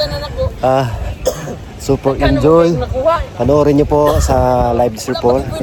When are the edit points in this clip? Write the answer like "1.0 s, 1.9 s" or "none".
none